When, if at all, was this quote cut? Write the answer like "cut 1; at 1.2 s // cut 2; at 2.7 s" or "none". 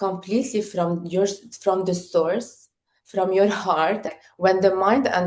cut 1; at 4.1 s